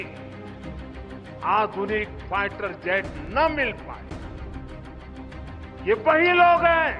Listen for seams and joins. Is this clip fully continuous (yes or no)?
no